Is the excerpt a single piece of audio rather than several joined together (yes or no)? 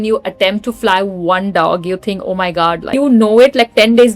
no